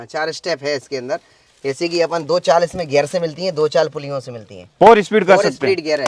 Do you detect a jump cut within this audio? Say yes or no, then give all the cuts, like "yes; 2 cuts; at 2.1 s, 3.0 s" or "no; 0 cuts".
no; 0 cuts